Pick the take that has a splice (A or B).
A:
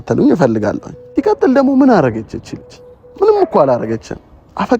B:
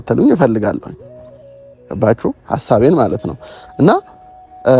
A